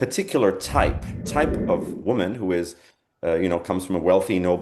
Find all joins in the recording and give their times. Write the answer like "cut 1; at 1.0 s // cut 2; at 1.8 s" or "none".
cut 1; at 1.1 s